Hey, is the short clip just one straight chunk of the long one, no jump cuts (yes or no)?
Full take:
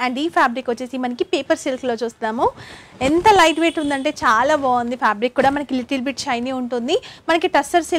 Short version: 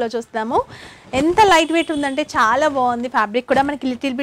yes